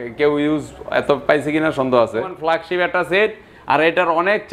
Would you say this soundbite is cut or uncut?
cut